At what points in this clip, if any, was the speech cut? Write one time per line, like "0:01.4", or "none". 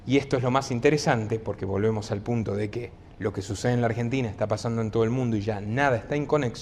none